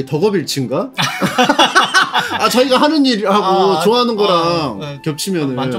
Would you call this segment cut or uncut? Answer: uncut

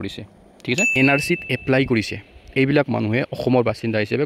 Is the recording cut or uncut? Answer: cut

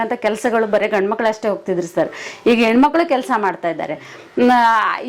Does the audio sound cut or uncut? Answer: uncut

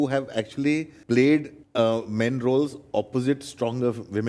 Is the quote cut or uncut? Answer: cut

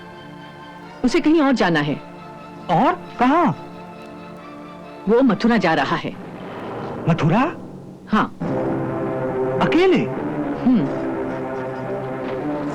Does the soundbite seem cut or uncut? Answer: uncut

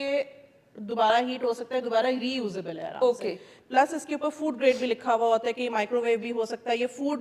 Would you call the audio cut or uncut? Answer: uncut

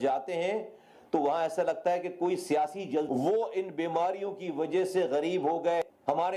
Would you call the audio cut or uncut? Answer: uncut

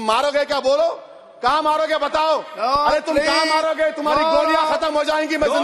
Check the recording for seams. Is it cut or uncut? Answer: uncut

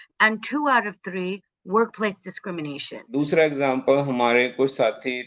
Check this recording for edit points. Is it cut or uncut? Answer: cut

